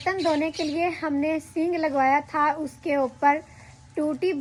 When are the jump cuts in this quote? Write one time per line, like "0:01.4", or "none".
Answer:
none